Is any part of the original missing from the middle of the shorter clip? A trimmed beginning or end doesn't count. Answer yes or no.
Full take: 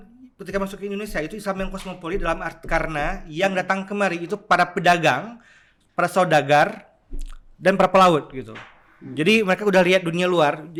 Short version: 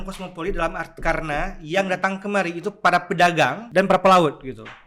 yes